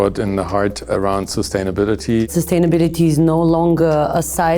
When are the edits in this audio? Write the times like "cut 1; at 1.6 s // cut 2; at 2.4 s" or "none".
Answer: cut 1; at 0.9 s // cut 2; at 2.3 s